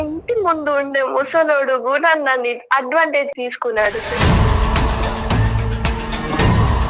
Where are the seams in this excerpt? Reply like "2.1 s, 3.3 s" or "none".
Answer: 3.3 s